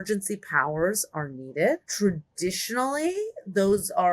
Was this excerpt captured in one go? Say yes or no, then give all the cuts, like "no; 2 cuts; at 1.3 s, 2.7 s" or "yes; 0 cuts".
no; 1 cut; at 1.9 s